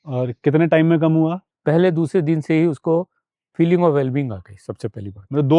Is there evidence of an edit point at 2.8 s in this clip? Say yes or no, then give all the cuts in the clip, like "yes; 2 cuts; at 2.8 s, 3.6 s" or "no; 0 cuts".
no; 1 cut; at 1.5 s